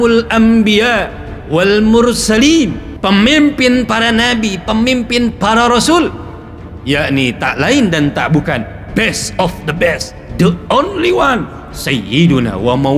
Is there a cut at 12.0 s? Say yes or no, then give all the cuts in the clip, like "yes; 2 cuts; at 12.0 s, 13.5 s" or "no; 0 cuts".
no; 1 cut; at 2.9 s